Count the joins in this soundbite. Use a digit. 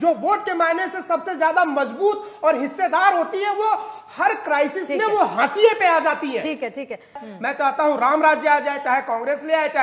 1